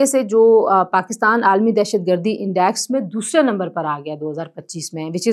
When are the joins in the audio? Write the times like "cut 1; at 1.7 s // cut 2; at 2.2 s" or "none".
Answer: none